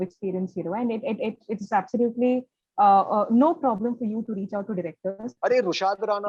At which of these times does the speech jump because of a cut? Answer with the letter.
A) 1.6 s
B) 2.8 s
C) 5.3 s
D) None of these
C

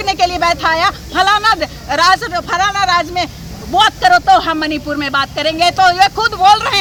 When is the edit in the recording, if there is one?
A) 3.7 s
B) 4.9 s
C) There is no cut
C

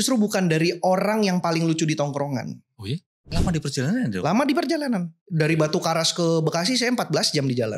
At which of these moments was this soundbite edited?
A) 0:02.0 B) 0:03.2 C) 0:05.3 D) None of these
B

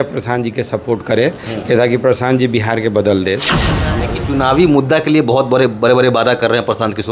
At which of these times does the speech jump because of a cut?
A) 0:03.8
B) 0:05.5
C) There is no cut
A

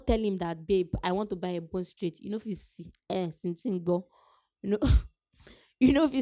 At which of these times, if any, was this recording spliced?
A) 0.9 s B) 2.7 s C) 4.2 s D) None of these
D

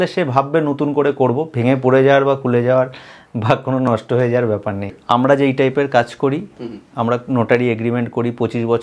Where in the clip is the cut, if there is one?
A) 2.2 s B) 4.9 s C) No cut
B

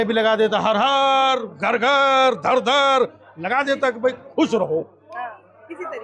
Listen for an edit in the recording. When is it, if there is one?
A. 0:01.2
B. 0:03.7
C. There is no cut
C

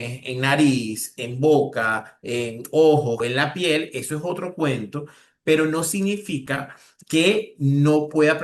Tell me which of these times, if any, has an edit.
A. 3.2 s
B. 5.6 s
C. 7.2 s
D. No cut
A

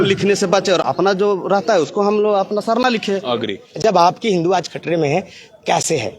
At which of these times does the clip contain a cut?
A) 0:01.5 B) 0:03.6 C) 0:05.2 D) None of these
B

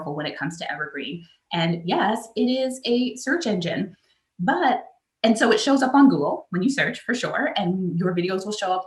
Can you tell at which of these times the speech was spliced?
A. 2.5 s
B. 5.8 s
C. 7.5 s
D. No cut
D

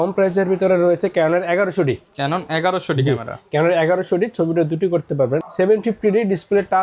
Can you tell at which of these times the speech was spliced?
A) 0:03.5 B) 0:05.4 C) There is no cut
B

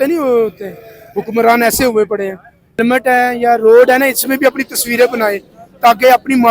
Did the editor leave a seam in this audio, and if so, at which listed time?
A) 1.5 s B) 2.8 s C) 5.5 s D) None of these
B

